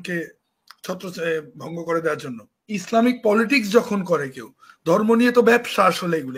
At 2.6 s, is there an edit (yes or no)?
yes